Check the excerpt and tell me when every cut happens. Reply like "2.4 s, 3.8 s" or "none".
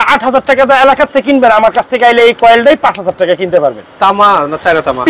none